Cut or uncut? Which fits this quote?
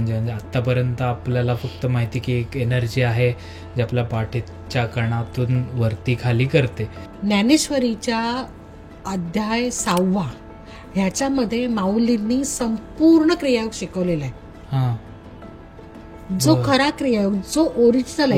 cut